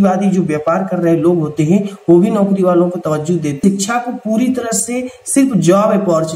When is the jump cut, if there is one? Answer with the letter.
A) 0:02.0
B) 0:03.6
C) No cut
B